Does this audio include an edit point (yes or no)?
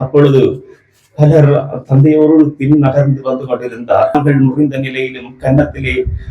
yes